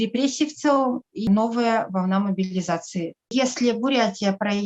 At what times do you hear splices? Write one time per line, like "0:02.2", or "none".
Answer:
0:01.3
0:03.3